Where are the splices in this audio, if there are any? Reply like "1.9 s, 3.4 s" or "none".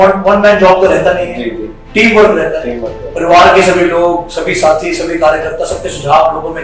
none